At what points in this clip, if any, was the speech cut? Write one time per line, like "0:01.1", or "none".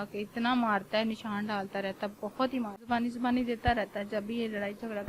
0:02.8